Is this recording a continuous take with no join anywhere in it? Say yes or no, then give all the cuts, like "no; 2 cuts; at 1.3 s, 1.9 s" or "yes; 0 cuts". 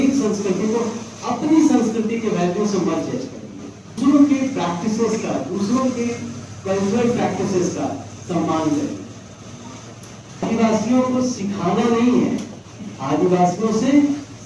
no; 2 cuts; at 4.0 s, 10.4 s